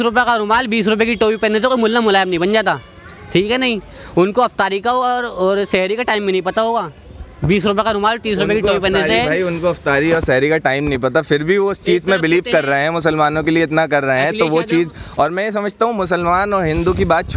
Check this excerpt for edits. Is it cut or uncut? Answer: uncut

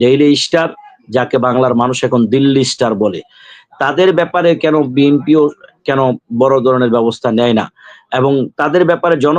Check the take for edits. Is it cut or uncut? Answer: uncut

